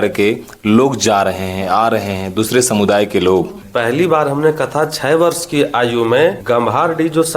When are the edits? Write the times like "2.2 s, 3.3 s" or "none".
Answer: 3.6 s, 6.4 s